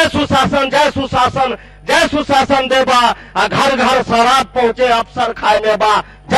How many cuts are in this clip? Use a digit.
0